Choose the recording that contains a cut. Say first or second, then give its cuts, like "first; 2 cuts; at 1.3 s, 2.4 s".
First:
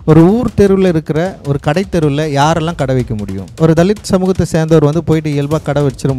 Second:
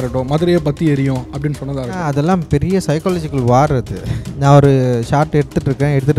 second; 2 cuts; at 2.0 s, 4.2 s